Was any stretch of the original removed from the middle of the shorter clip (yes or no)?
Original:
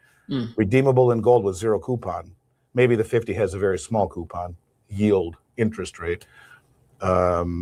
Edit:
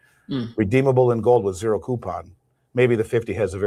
no